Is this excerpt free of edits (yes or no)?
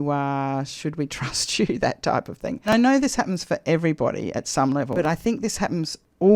no